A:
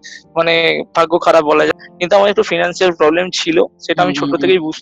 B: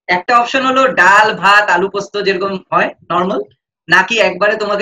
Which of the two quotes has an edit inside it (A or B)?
A